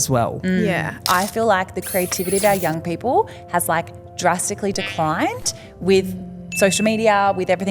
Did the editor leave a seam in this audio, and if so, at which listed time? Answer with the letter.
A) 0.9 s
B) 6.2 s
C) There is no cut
A